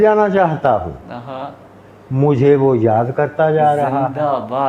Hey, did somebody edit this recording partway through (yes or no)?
no